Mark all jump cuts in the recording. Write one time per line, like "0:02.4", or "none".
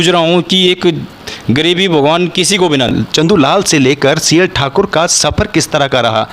0:02.9